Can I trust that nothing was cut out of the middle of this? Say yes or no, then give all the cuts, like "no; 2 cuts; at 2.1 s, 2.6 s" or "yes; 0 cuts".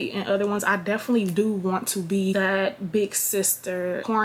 yes; 0 cuts